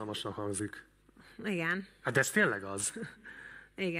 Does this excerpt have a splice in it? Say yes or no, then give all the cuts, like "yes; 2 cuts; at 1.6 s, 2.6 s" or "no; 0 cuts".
no; 0 cuts